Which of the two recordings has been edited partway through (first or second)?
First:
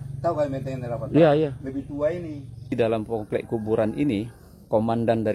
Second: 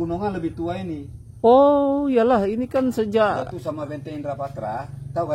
first